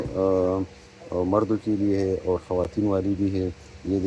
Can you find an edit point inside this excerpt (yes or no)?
no